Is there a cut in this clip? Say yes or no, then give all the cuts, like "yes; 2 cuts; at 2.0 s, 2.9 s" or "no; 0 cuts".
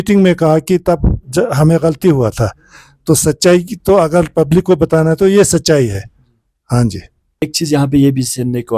no; 0 cuts